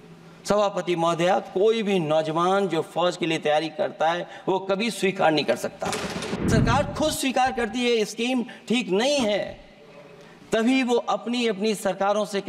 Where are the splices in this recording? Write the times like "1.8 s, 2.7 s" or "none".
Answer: 6.4 s